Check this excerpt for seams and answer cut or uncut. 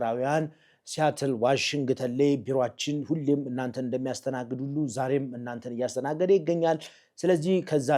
uncut